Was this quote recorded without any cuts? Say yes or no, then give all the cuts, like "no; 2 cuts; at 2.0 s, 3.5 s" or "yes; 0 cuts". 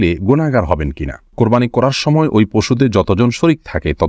no; 1 cut; at 1.3 s